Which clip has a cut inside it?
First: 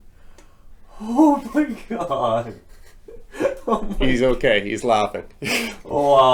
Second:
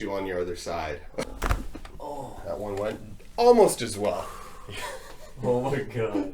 second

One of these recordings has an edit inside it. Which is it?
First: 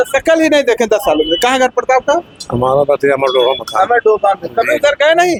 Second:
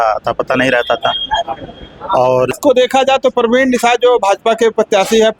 second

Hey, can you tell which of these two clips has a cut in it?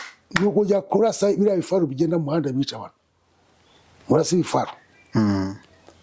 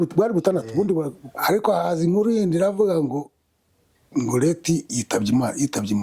second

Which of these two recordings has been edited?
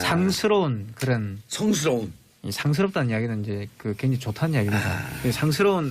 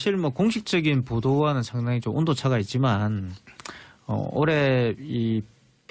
first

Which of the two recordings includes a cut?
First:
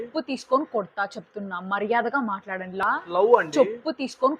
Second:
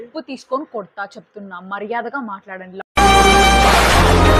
first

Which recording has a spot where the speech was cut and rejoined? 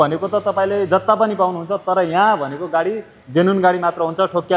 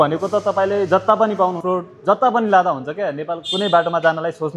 second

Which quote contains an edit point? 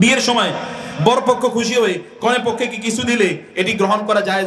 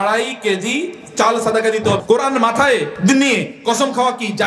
second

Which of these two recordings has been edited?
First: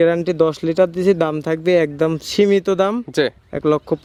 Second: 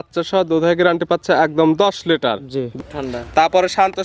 second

